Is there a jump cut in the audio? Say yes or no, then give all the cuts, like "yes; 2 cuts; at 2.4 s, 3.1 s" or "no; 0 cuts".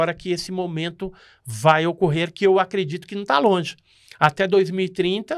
no; 0 cuts